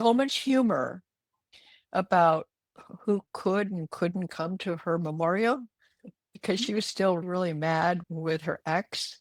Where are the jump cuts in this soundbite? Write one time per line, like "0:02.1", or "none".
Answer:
none